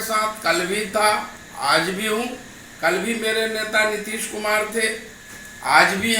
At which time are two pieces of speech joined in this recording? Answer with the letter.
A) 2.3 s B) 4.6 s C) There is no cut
C